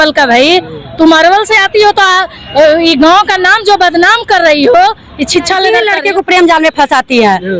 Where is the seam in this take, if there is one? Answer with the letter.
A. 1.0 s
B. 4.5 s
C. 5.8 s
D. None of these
C